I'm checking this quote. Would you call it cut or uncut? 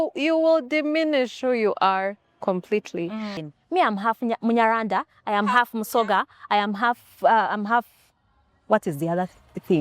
cut